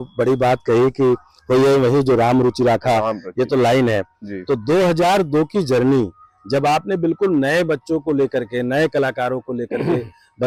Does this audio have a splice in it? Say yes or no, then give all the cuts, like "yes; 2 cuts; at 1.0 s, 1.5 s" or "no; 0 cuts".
no; 0 cuts